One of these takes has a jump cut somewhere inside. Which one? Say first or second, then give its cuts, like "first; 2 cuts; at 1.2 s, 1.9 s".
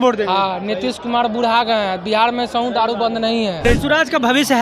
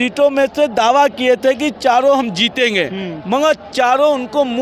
first; 1 cut; at 3.6 s